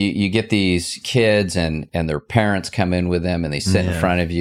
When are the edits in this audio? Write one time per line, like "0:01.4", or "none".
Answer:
0:00.9
0:01.9